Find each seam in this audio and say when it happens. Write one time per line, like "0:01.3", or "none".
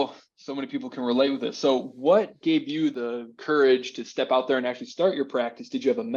none